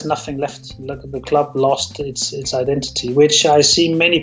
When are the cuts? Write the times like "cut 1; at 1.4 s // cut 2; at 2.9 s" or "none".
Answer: none